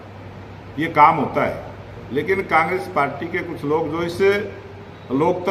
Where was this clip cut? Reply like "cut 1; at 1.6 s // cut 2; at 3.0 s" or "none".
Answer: none